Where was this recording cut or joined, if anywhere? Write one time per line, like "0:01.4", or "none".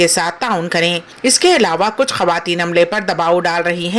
0:01.1